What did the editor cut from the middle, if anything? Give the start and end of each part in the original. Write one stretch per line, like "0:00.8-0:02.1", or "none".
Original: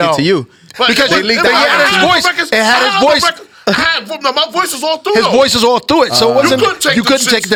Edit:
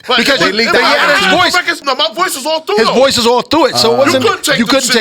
0:02.4-0:04.1